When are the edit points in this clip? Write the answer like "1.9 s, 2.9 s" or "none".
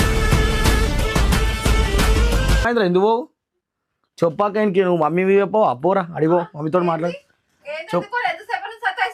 none